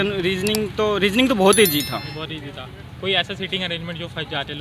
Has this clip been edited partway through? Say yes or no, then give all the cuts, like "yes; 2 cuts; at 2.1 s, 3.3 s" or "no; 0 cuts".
no; 0 cuts